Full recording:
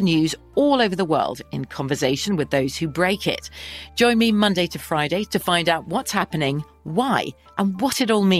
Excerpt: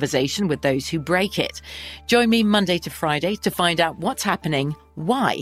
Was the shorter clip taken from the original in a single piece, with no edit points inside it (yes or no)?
yes